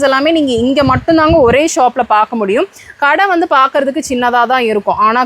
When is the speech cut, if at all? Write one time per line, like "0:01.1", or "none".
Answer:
none